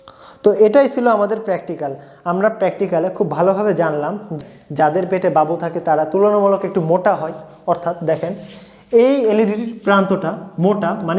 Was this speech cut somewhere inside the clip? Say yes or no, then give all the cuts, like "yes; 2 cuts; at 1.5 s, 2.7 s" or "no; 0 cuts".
yes; 1 cut; at 4.3 s